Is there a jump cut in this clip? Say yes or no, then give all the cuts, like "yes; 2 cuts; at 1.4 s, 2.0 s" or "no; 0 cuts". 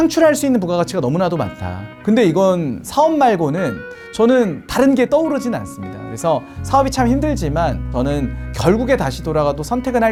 no; 0 cuts